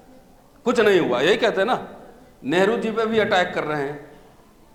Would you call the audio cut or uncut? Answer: uncut